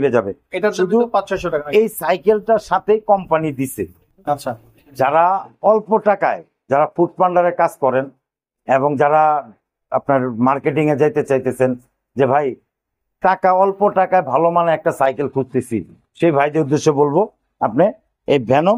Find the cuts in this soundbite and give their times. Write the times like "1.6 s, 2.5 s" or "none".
4.1 s